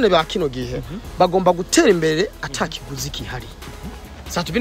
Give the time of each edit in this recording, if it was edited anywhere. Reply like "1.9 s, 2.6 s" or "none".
none